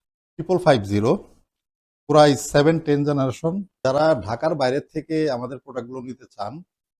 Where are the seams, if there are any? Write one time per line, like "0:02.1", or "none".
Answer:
0:03.8